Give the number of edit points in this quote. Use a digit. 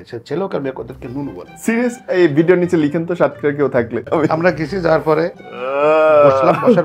2